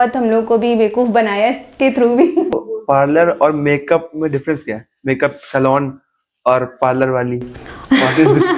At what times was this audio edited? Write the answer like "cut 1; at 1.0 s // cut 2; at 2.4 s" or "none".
cut 1; at 2.5 s